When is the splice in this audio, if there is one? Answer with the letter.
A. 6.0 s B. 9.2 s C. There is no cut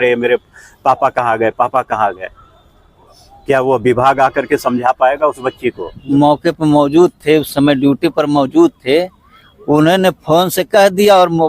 A